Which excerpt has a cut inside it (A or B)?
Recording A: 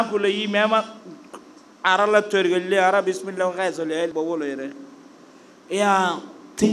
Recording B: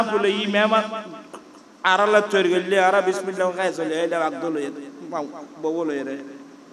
A